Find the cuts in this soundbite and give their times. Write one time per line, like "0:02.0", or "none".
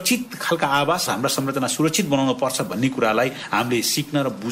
0:01.1